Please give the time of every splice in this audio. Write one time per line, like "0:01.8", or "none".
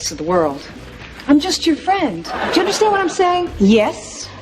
0:02.4
0:03.5